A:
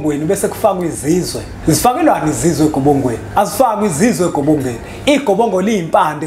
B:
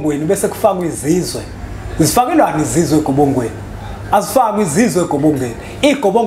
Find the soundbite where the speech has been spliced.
A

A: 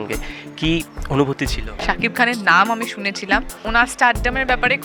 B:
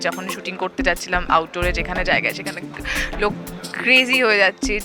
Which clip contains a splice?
A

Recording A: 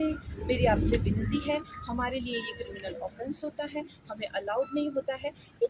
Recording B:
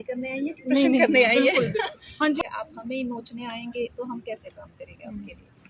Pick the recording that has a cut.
B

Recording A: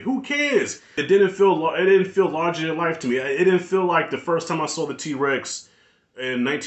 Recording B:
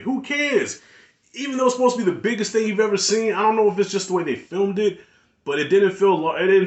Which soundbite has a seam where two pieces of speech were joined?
A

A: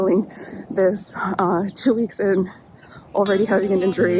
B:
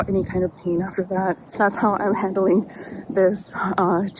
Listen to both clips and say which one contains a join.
B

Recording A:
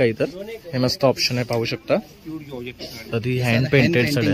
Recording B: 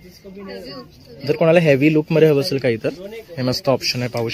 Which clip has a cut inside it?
A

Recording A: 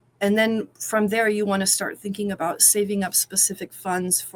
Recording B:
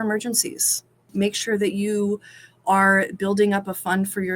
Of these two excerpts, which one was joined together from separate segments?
B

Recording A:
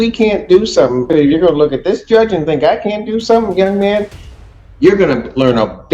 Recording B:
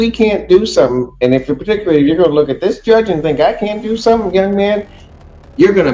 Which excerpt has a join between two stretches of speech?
A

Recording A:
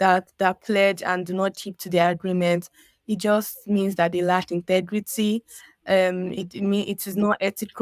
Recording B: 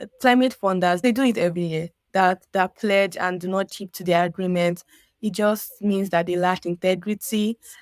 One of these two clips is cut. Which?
B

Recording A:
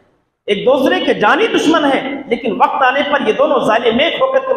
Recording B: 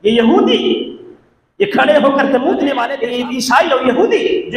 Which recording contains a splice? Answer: B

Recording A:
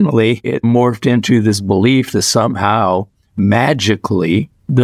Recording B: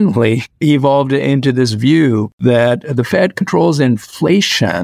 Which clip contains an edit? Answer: B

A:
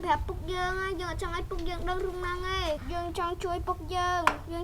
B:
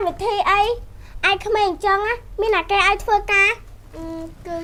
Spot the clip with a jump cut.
A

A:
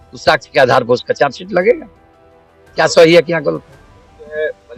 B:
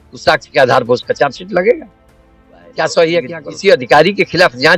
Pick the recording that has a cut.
B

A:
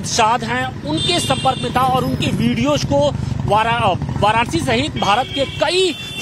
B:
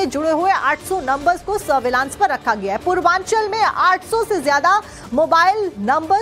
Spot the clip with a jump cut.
A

